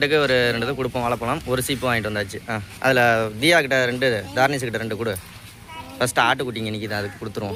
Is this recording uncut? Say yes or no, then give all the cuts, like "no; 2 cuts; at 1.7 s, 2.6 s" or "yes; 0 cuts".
yes; 0 cuts